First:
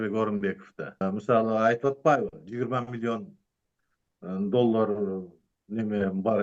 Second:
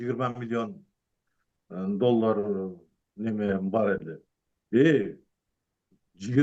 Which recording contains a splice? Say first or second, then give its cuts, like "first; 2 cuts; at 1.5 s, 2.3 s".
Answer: first; 1 cut; at 1.0 s